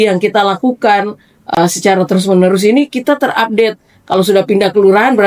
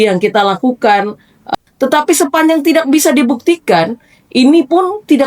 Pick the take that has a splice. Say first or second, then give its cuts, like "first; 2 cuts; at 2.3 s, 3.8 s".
second; 1 cut; at 1.5 s